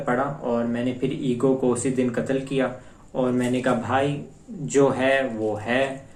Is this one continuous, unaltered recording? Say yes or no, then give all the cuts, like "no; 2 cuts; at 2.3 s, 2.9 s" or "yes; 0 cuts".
yes; 0 cuts